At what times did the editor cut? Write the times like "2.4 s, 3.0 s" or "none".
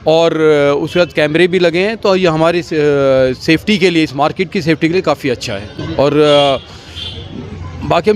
none